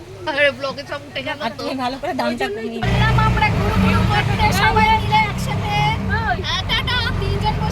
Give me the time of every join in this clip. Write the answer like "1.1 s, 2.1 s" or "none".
2.8 s